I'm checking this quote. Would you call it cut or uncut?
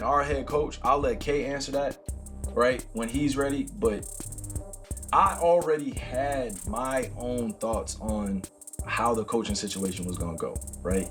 uncut